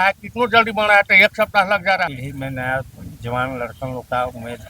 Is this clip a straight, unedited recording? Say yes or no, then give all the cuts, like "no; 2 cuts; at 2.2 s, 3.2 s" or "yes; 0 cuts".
no; 1 cut; at 2.1 s